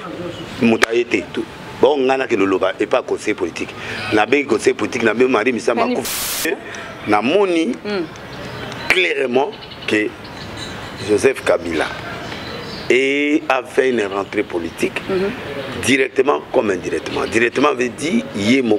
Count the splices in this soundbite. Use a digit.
1